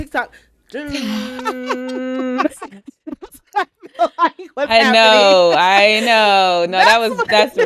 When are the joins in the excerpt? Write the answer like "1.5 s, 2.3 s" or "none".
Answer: none

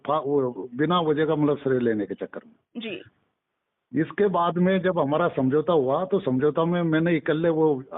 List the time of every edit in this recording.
none

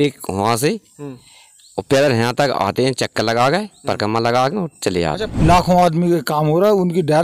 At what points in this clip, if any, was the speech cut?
5.3 s

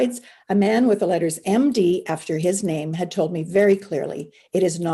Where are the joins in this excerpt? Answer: none

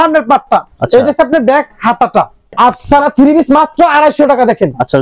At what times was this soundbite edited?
2.5 s

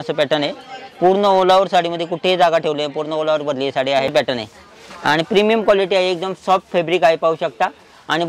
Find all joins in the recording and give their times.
4.1 s

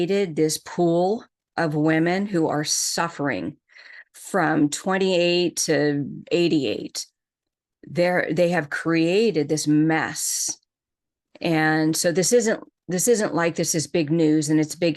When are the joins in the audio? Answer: none

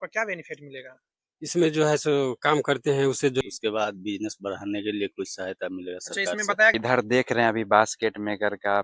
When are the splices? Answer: 3.4 s, 6.7 s

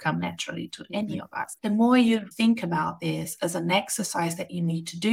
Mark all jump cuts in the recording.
1.5 s, 2.3 s

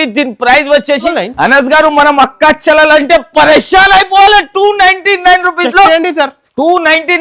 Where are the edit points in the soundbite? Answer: 1.1 s

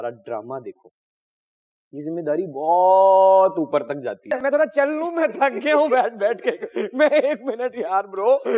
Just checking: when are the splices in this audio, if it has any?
4.3 s

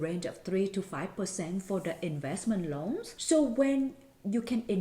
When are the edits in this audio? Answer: 3.1 s

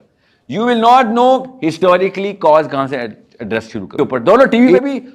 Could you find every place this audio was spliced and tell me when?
3.9 s

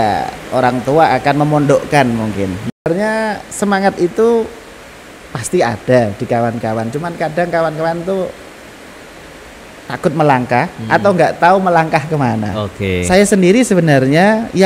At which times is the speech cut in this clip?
2.9 s

